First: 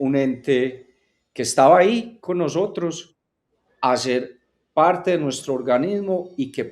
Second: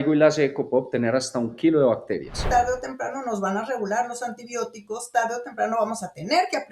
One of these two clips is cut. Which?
second; 1 cut; at 2.4 s

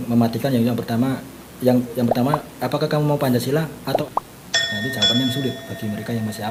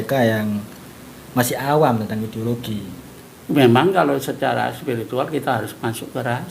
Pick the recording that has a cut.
second; 1 cut; at 3.0 s

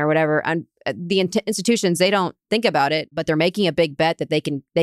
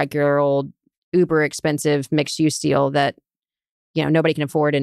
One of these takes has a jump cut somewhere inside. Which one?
first; 1 cut; at 3.2 s

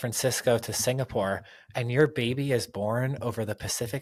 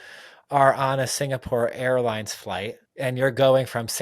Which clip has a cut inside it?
second; 1 cut; at 2.8 s

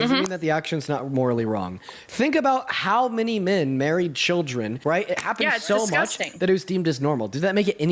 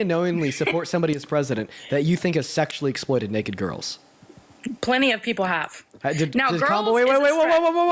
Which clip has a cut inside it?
first; 1 cut; at 4.7 s

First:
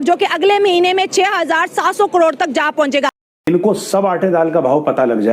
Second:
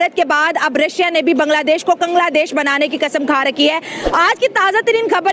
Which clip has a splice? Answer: first; 1 cut; at 3.3 s

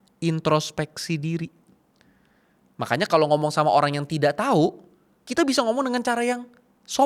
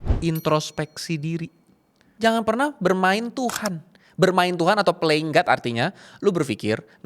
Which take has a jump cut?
second; 1 cut; at 2.0 s

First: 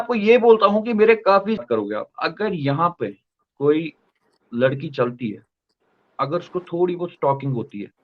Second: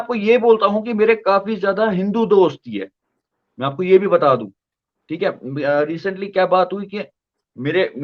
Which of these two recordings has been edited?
first; 1 cut; at 1.6 s

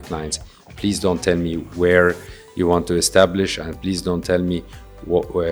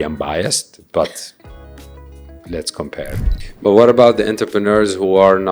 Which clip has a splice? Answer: second; 1 cut; at 3.2 s

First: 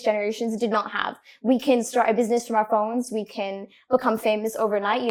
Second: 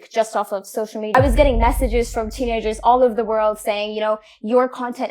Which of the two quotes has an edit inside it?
second; 1 cut; at 1.1 s

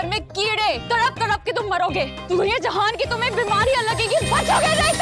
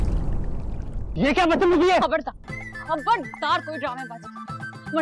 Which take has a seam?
second; 1 cut; at 1.0 s

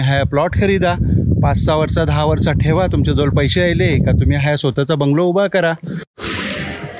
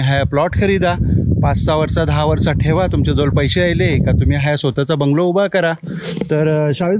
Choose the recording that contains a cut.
first; 1 cut; at 6.0 s

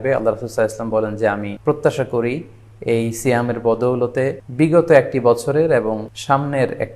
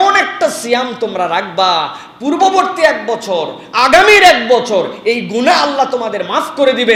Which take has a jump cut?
first; 3 cuts; at 1.5 s, 4.4 s, 6.1 s

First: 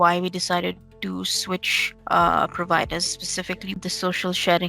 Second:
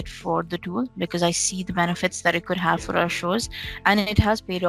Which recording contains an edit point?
first; 1 cut; at 3.8 s

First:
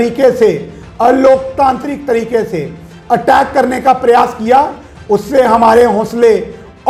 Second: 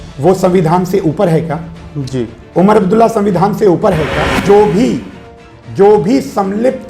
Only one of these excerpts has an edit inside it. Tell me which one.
second; 1 cut; at 4.4 s

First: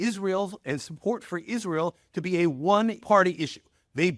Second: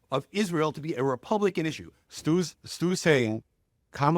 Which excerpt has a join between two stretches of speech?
second; 1 cut; at 2.1 s

